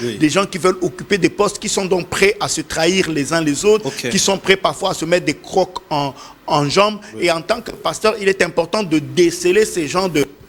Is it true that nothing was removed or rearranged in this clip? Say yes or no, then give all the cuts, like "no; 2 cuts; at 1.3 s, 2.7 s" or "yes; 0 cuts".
yes; 0 cuts